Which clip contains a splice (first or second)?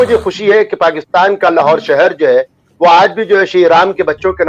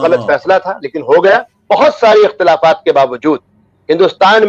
second